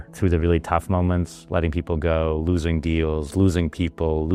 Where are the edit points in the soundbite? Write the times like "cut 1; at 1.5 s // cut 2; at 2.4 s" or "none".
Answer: none

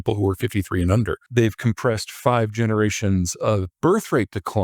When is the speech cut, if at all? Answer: cut 1; at 1.2 s

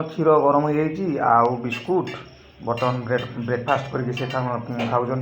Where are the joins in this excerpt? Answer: none

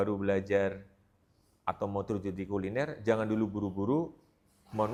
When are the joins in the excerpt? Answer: none

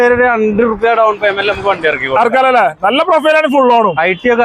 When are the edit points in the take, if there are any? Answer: none

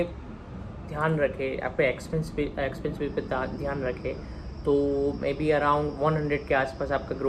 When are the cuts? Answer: none

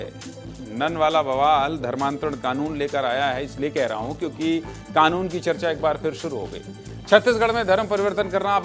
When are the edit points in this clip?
none

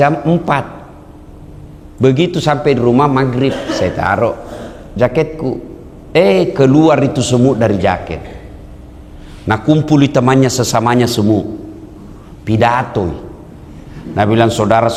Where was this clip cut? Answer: none

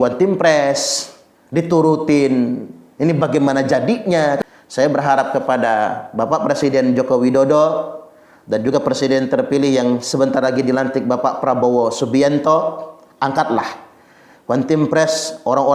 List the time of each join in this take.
cut 1; at 4.4 s

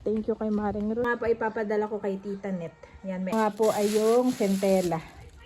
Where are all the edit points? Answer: cut 1; at 1.1 s // cut 2; at 3.3 s

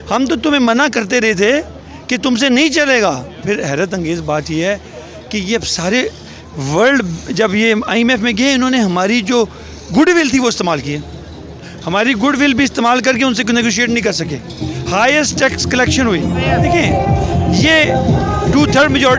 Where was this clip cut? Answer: cut 1; at 3.4 s // cut 2; at 16.4 s

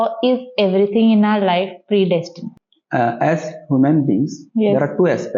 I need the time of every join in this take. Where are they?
cut 1; at 2.4 s

